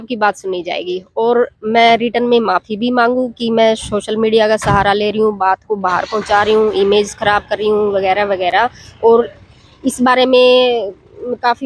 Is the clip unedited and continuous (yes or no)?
yes